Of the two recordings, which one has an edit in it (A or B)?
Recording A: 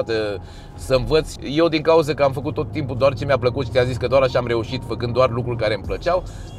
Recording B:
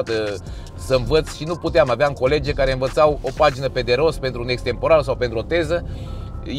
A